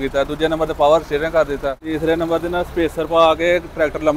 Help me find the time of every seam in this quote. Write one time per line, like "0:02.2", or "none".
0:01.8